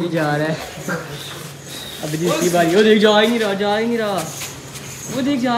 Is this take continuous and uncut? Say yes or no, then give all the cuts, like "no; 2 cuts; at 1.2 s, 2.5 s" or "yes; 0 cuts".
yes; 0 cuts